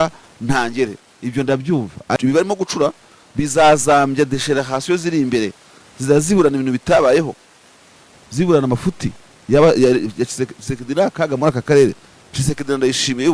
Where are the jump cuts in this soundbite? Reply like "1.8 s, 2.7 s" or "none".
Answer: 2.2 s